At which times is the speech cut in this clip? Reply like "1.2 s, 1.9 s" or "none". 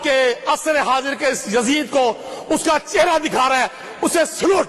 none

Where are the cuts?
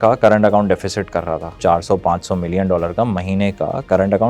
1.5 s

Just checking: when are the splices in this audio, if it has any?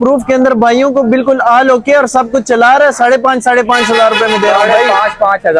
none

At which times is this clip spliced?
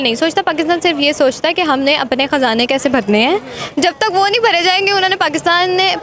none

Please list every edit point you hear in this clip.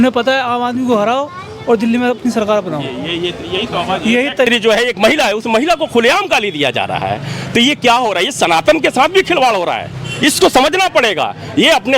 4.5 s

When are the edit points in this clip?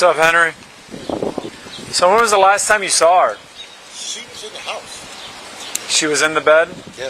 1.6 s, 5.7 s

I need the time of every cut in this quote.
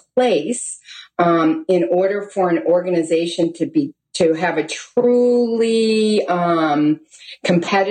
none

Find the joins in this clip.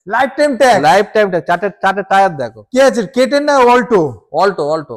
none

